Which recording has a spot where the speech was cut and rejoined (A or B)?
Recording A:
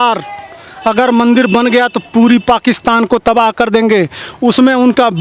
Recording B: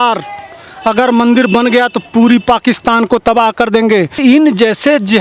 B